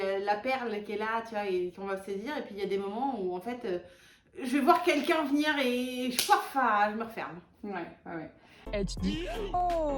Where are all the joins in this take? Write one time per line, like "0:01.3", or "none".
none